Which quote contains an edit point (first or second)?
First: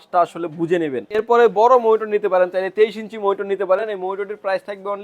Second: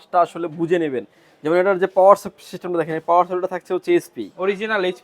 first